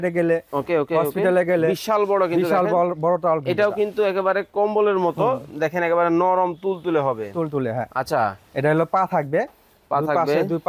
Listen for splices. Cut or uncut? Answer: cut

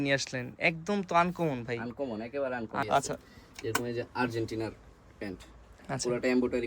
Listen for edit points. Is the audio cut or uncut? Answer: cut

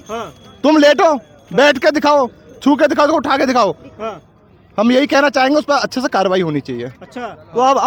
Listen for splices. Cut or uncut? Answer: uncut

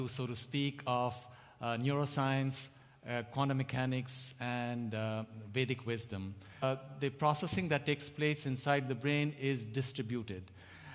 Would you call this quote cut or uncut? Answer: uncut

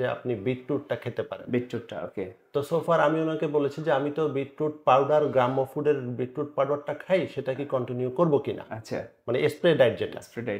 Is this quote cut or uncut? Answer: uncut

